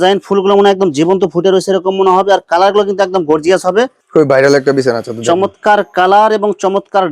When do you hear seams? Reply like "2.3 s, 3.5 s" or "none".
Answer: 4.0 s